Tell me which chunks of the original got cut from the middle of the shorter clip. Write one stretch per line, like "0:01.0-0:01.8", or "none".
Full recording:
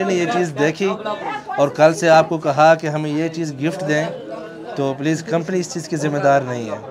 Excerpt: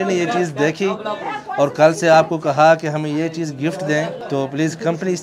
0:04.2-0:04.7

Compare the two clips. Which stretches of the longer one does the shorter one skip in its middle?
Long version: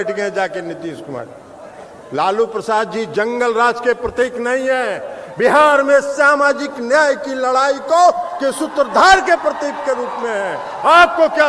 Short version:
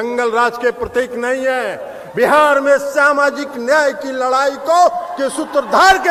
none

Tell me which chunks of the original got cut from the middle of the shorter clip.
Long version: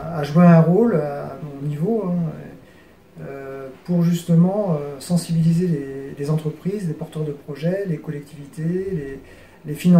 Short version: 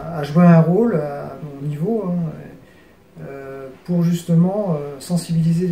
none

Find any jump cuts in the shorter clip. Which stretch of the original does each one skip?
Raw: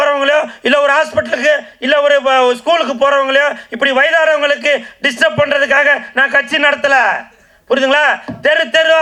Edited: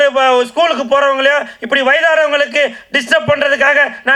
none

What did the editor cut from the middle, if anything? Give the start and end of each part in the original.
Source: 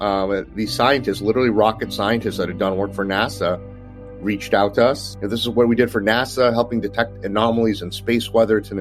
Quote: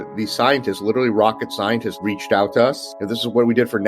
0:02.3-0:04.1

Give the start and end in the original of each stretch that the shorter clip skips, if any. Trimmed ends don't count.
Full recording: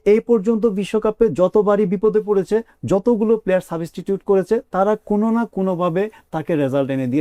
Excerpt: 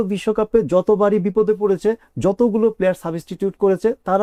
none

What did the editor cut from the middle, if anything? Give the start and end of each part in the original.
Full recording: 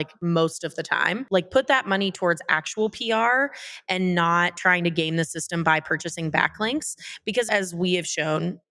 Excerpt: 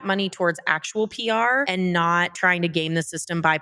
0:03.5-0:03.9

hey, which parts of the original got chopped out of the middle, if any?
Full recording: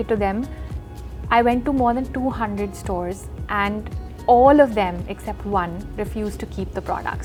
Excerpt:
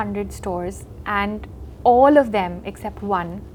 none

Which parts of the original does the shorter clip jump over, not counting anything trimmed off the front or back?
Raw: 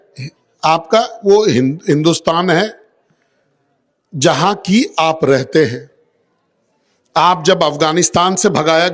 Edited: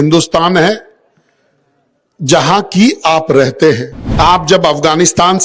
0:05.9-0:06.9

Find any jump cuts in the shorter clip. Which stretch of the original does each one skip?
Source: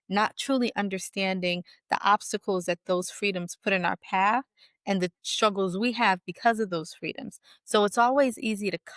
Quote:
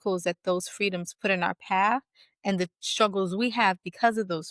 none

